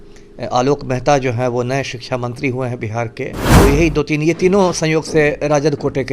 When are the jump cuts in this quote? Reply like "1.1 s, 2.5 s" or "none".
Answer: 3.4 s